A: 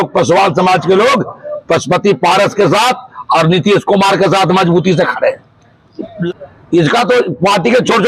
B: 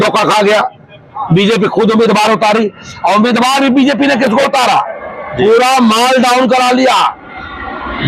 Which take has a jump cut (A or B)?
A